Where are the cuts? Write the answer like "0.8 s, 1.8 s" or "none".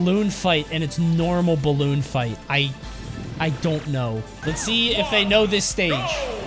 4.3 s